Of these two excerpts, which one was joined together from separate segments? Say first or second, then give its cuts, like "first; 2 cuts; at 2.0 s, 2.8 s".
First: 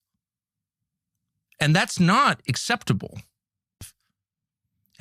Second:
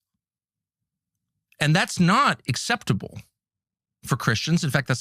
first; 1 cut; at 3.9 s